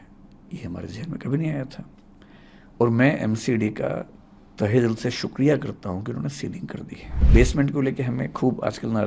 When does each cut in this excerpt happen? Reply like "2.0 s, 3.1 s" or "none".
7.3 s